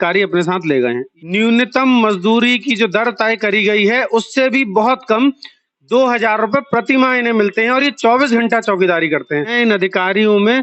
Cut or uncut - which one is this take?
cut